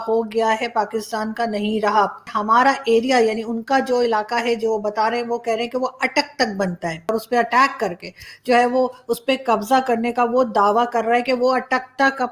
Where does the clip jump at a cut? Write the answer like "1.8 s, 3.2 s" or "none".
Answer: 2.3 s, 7.1 s